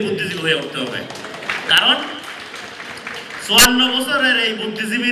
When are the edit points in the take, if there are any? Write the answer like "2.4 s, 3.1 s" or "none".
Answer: none

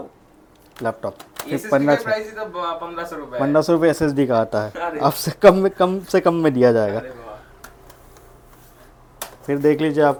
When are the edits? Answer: none

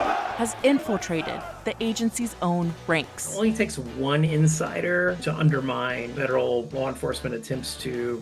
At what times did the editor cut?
5.2 s

